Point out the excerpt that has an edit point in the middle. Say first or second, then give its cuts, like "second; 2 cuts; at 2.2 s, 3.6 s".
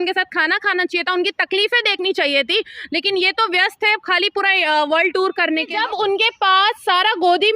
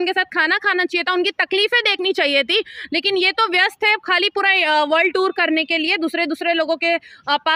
first; 1 cut; at 5.7 s